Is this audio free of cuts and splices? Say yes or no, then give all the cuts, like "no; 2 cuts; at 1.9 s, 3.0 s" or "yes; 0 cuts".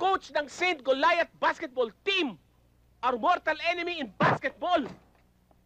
yes; 0 cuts